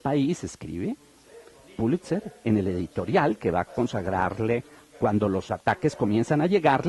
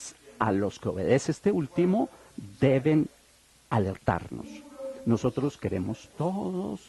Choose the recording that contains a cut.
first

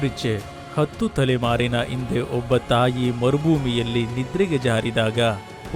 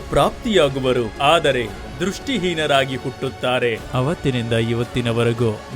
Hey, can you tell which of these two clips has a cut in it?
second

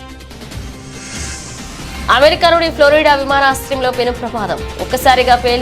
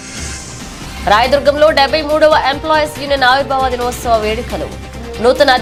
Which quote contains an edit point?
first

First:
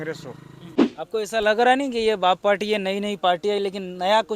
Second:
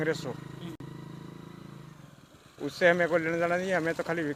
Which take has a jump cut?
first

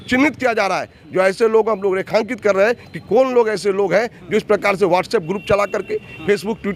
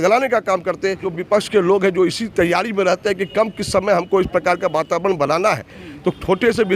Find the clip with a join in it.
second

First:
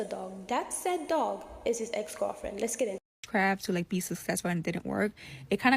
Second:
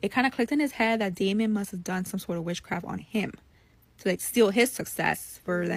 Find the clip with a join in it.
first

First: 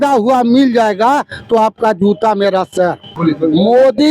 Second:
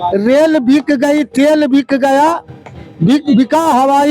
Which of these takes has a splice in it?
first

